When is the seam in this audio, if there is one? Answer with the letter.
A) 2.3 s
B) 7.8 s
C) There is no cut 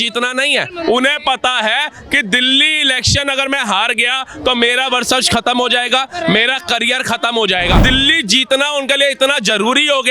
B